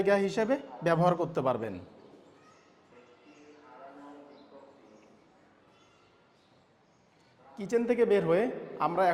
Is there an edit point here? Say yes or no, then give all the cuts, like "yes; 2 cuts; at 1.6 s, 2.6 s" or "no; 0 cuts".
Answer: no; 0 cuts